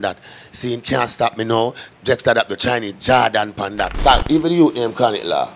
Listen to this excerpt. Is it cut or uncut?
cut